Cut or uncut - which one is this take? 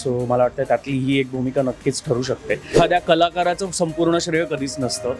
cut